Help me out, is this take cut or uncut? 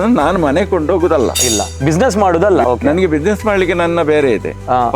cut